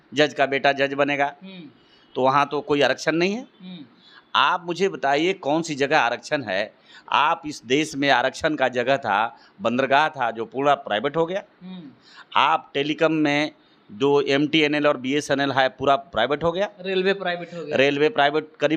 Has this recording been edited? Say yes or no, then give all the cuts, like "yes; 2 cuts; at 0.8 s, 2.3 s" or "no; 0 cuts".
no; 0 cuts